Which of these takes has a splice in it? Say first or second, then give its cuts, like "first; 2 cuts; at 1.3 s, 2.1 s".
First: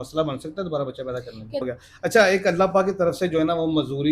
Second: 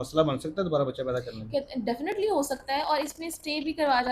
first; 1 cut; at 1.6 s